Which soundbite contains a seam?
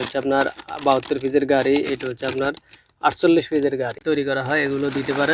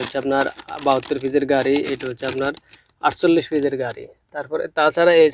first; 1 cut; at 4.0 s

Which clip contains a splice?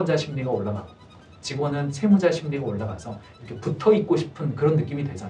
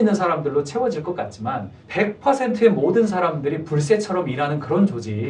second; 1 cut; at 1.8 s

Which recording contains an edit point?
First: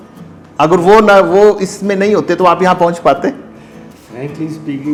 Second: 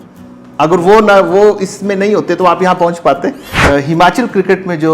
second; 1 cut; at 3.5 s

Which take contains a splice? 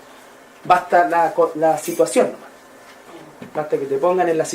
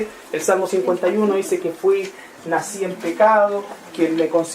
second; 1 cut; at 1.4 s

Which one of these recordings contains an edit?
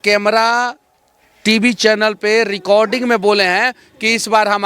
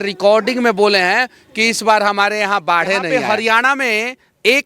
second; 1 cut; at 3.4 s

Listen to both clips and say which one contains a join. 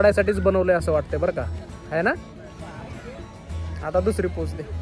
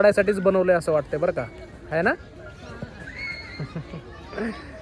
first; 1 cut; at 2.6 s

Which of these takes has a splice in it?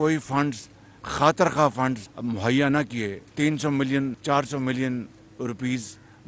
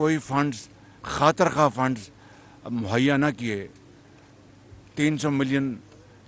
first; 3 cuts; at 2.1 s, 3.2 s, 4.2 s

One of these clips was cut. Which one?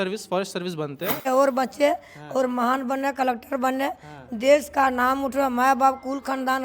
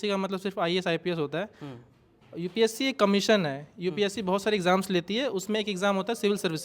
first; 1 cut; at 1.3 s

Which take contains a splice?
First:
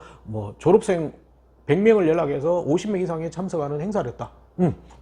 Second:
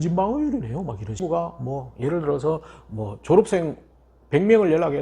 second; 1 cut; at 1.2 s

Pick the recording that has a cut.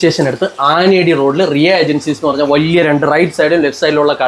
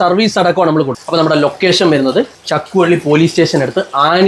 second; 2 cuts; at 1.0 s, 2.4 s

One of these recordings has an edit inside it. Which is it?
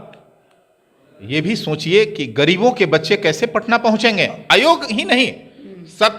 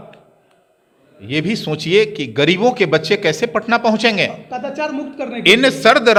first; 1 cut; at 4.4 s

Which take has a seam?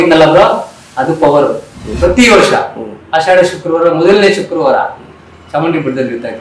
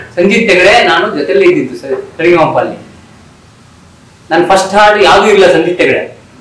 first; 1 cut; at 1.9 s

